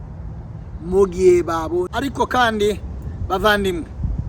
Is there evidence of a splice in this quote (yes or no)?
yes